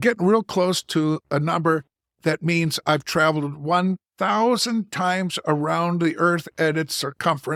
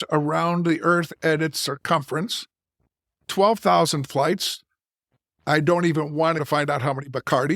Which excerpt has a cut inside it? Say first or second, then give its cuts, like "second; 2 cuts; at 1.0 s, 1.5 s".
second; 1 cut; at 6.4 s